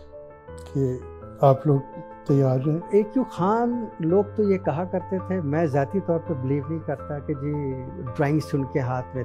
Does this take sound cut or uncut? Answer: cut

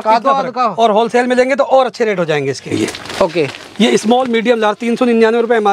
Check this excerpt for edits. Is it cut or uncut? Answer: cut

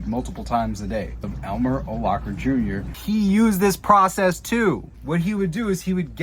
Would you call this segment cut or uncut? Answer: cut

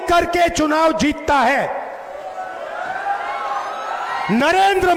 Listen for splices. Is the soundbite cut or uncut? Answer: uncut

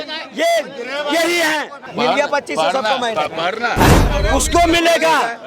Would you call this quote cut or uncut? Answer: cut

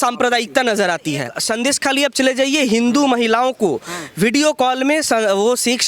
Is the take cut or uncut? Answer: cut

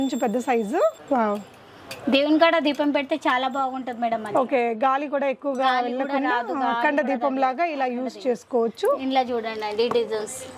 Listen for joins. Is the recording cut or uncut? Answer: uncut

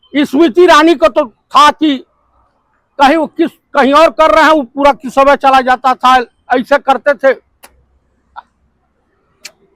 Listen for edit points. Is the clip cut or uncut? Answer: uncut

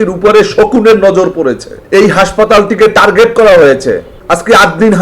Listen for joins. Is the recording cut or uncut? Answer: cut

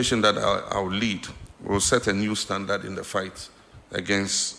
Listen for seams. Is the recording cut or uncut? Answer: uncut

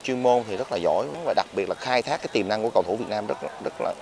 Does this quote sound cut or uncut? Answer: cut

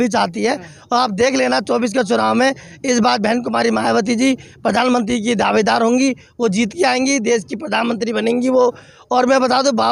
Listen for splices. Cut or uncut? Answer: uncut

